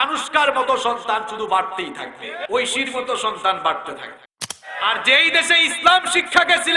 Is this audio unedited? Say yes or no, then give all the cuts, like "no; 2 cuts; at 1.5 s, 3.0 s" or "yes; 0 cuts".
no; 2 cuts; at 2.4 s, 4.6 s